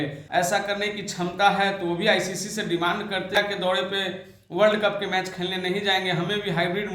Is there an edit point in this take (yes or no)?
yes